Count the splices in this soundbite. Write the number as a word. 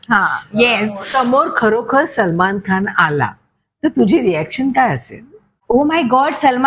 two